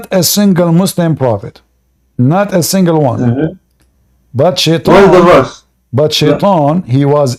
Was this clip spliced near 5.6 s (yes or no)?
no